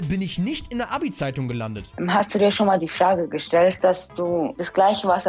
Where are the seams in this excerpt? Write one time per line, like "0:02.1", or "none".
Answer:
0:01.8
0:03.8

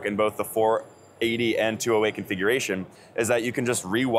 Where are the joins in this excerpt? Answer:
none

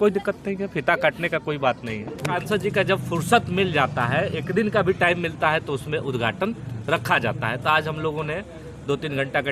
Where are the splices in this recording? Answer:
0:02.3

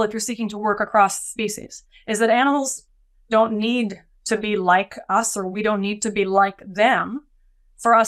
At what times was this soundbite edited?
none

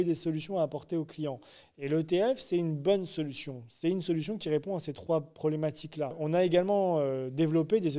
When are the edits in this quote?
0:06.2

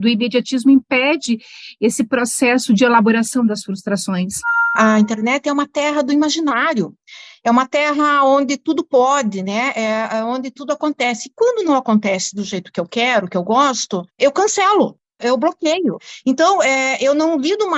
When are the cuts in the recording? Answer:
0:04.8
0:16.1

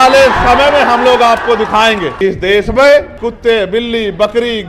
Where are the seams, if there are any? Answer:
0:02.1
0:03.2

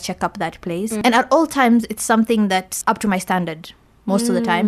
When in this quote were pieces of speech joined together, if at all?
0:01.0
0:02.7

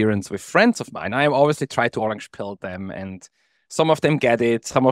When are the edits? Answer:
none

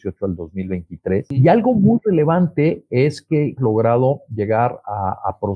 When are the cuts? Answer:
0:01.3
0:03.6

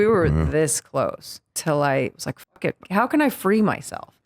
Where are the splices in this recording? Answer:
0:01.6
0:02.8

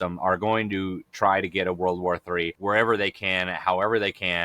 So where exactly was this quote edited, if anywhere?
0:02.5

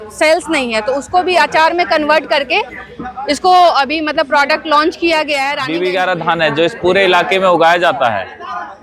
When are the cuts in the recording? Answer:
0:05.5

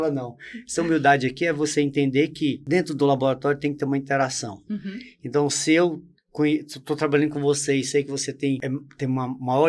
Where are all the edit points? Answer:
0:02.6
0:08.6

